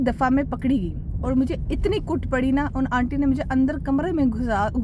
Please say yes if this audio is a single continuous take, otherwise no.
yes